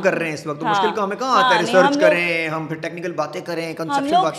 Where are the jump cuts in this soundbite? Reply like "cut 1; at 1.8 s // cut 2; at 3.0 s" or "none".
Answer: none